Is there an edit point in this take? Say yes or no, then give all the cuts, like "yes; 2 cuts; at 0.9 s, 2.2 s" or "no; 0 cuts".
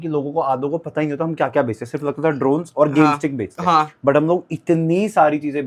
no; 0 cuts